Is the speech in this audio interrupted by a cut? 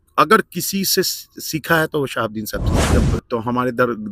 yes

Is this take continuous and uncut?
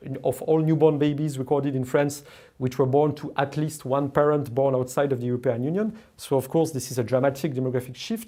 yes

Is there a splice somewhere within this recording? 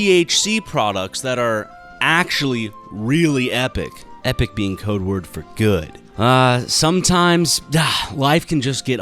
yes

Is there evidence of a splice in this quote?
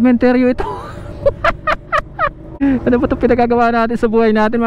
yes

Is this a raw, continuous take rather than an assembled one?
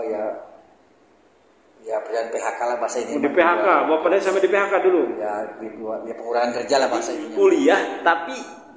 no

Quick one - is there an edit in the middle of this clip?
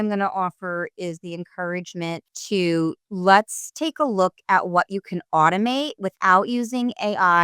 yes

